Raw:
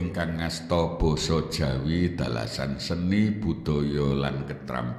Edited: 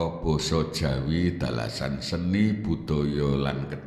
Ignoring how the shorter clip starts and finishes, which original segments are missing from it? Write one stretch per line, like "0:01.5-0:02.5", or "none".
none